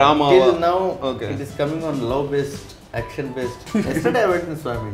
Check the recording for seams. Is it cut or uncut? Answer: cut